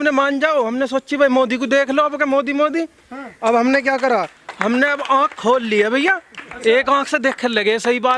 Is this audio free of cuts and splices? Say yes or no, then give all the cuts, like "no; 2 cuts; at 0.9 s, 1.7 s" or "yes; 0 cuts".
yes; 0 cuts